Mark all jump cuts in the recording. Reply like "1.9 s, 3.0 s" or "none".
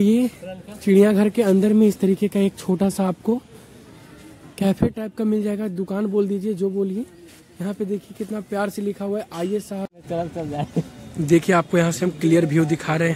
9.9 s